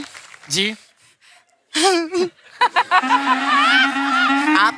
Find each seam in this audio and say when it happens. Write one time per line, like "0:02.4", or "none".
none